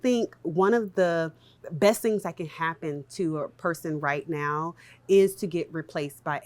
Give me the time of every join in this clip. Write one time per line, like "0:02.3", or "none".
0:01.6